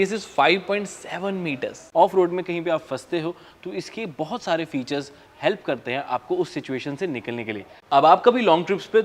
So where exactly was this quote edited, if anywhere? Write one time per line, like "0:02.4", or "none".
0:01.8
0:07.7

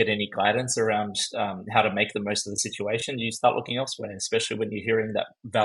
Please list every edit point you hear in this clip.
none

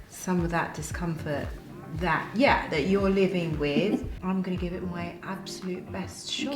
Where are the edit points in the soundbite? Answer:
0:04.1

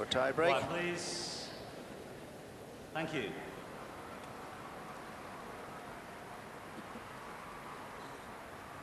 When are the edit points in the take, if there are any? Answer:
0:07.4

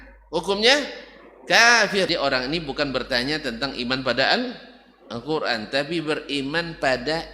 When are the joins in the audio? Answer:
0:02.1

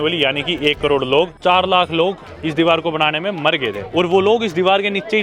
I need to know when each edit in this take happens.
0:01.4
0:03.8

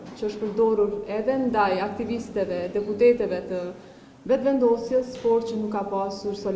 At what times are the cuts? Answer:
none

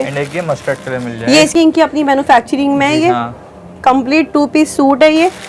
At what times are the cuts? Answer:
0:01.5

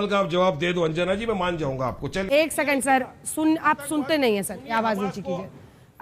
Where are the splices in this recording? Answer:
0:02.2

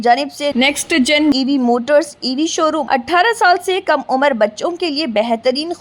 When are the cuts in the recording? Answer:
0:02.8

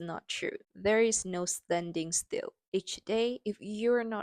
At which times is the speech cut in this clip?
0:02.6

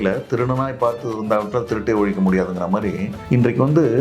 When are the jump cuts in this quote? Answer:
0:03.1

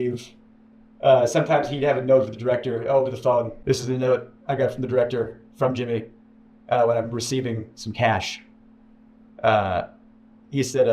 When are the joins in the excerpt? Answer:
0:03.5

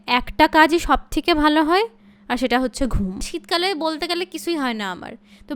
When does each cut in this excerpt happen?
0:03.3

